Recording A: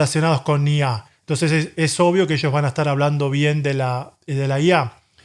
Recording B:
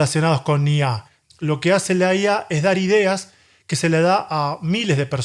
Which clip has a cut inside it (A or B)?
B